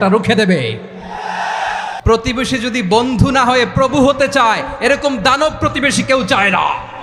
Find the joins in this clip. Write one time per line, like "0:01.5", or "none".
0:01.9

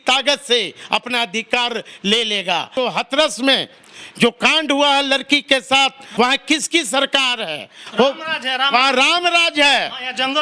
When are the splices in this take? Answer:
0:02.7
0:06.0

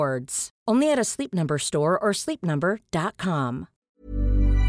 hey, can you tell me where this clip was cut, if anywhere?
0:03.7

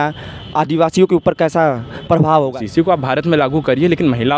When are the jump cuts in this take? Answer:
0:02.6

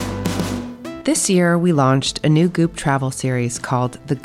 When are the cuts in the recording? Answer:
0:01.0

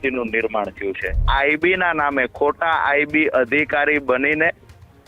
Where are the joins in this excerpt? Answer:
0:01.2

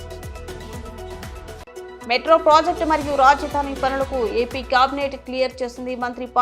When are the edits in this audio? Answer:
none

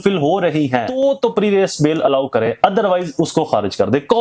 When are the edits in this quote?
0:01.0

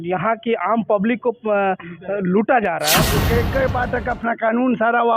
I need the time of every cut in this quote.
0:03.2

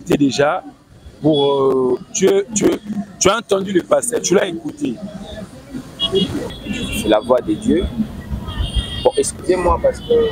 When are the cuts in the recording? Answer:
0:06.5

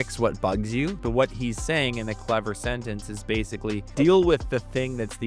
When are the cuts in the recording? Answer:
0:01.0
0:03.9

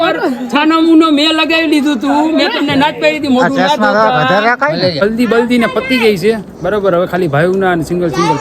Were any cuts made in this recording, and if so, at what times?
0:05.0

